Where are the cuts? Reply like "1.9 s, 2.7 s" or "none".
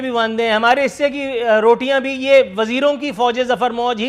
none